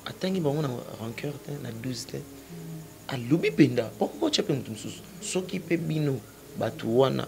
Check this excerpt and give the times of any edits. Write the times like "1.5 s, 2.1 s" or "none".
5.1 s